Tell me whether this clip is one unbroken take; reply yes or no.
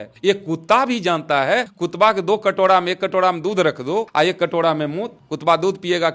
no